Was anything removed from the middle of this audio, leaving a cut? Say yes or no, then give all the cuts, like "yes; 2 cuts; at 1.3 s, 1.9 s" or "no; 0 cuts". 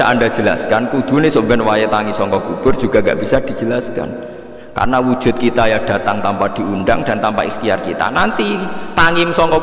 no; 0 cuts